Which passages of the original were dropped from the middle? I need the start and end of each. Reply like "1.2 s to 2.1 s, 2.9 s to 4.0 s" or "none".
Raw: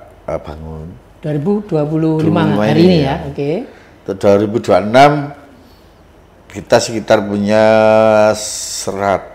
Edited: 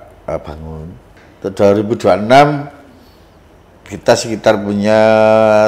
1.1 s to 3.8 s